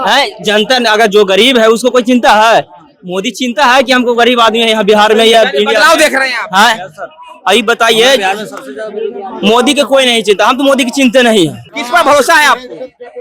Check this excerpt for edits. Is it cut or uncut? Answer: cut